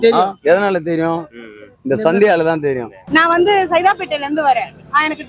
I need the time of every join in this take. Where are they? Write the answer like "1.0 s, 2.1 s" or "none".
2.9 s